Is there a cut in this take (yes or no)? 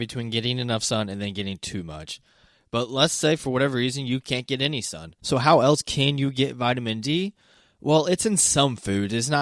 yes